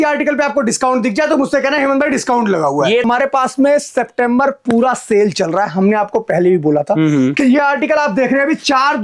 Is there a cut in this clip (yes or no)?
yes